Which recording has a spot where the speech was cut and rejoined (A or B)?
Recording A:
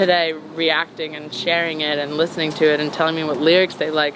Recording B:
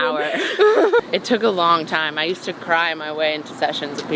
B